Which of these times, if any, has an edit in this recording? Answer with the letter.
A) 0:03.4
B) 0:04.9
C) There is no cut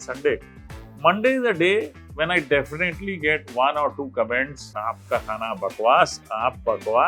B